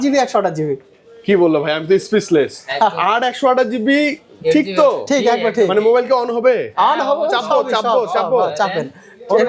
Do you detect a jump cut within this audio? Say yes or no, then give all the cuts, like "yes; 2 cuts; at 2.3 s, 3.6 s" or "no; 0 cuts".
no; 0 cuts